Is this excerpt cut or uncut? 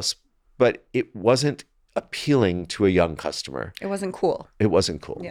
uncut